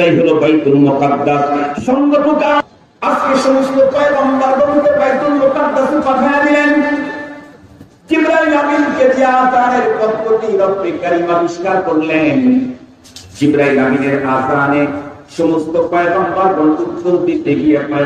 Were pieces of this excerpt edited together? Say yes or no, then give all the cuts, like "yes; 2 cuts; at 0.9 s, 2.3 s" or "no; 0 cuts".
yes; 1 cut; at 2.5 s